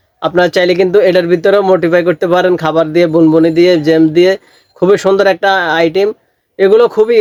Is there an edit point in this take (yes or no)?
no